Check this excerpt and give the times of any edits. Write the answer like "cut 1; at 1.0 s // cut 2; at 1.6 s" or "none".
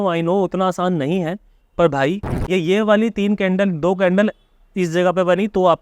cut 1; at 2.3 s